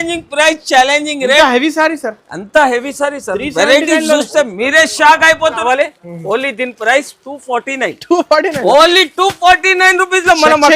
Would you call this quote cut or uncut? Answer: cut